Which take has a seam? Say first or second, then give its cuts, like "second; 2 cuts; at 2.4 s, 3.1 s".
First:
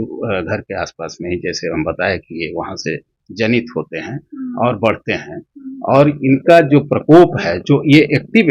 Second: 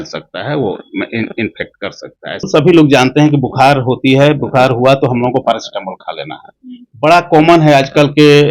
second; 1 cut; at 2.5 s